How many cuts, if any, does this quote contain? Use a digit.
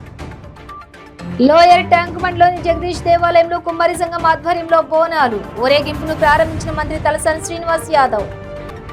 1